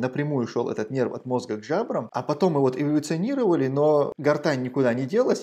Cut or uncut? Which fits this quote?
cut